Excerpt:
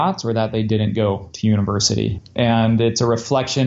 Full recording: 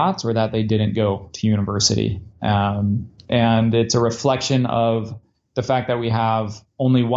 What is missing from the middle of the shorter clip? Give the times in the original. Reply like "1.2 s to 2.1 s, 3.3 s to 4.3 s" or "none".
2.2 s to 3.2 s